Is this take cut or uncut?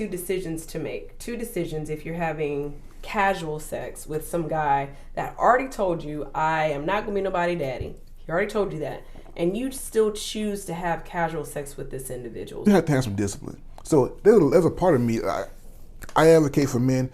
cut